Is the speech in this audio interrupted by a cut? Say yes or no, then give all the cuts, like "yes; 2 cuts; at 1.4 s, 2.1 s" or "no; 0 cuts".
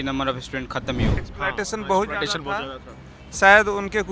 yes; 1 cut; at 1.2 s